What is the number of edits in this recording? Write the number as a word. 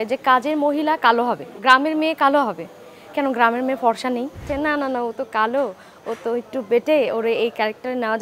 two